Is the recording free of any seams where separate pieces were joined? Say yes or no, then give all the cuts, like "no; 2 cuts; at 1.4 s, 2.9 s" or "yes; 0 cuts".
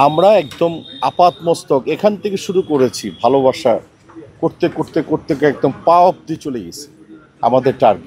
yes; 0 cuts